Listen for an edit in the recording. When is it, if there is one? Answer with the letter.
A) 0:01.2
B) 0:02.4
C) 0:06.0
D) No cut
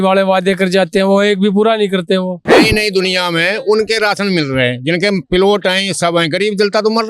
B